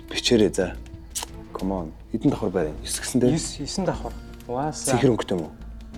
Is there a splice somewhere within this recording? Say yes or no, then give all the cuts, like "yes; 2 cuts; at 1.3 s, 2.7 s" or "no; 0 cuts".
no; 0 cuts